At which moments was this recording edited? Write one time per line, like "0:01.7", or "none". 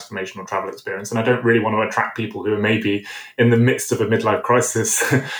none